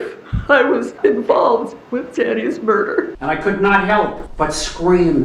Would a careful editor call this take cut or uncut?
cut